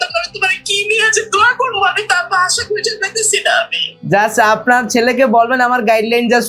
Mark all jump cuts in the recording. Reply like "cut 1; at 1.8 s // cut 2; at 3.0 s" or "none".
none